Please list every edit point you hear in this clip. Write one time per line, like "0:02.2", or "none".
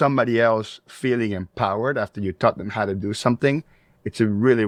none

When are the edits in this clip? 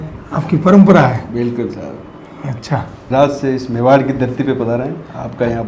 0:03.1

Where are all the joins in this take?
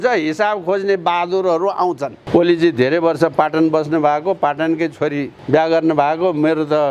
0:02.1
0:05.3

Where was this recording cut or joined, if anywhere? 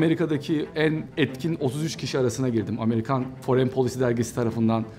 0:01.1
0:03.4

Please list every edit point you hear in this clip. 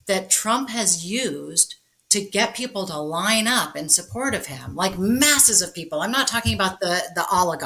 none

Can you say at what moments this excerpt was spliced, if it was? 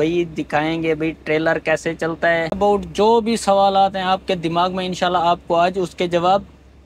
0:02.6

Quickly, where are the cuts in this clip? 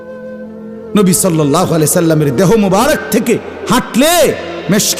0:00.9

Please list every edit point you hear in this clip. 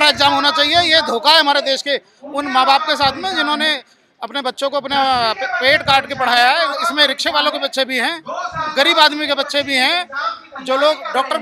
none

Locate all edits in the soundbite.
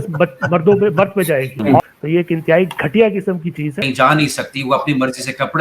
0:01.8
0:03.8

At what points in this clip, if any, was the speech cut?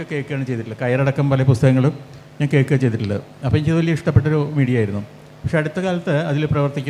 none

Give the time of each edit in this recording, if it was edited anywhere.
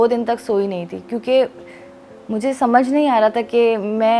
none

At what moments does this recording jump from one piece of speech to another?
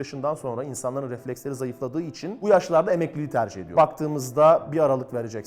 0:02.4

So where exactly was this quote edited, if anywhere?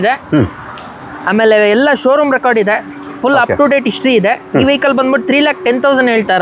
none

